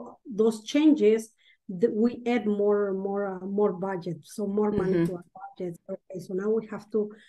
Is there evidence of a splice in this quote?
yes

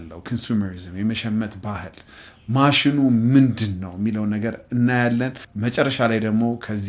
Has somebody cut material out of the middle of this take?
yes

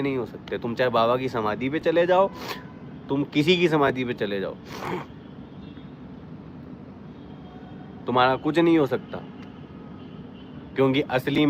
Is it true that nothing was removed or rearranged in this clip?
yes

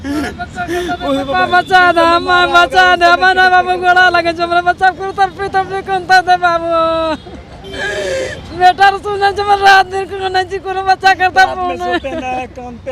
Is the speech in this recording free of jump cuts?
yes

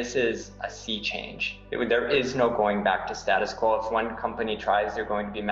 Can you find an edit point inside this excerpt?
no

